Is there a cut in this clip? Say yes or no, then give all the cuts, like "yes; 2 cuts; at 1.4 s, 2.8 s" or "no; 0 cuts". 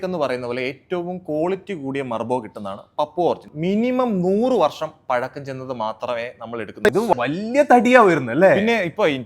yes; 2 cuts; at 3.5 s, 6.8 s